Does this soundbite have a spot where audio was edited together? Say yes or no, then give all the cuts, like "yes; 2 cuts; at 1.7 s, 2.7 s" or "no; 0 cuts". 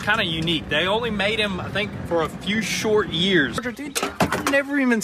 yes; 1 cut; at 3.6 s